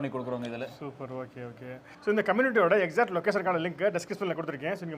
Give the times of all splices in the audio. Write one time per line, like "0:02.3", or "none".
none

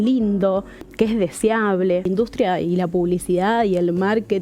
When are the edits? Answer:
0:00.9
0:02.1

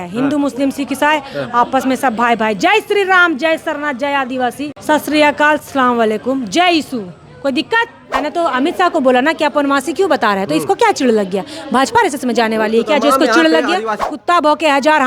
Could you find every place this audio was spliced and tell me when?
0:04.8
0:08.2
0:14.0

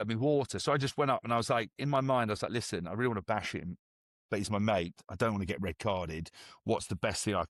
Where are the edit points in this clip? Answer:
none

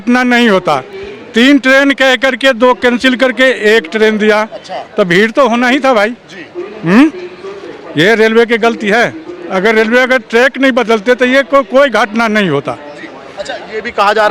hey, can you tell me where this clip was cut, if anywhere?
none

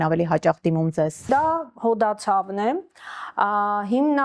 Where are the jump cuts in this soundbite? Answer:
0:01.3

